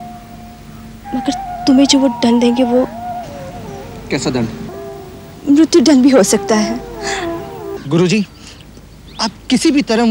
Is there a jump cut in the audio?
yes; 2 cuts; at 4.7 s, 7.7 s

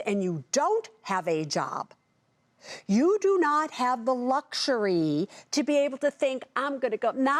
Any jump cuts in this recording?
no; 0 cuts

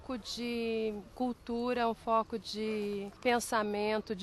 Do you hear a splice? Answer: yes; 2 cuts; at 1.1 s, 3.1 s

